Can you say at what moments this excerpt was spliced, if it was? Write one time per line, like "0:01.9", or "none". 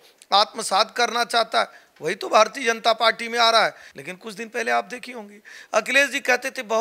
0:03.9